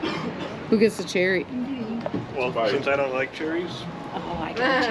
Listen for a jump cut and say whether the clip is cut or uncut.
uncut